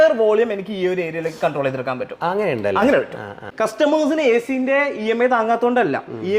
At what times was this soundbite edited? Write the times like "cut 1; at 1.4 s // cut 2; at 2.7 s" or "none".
cut 1; at 3.3 s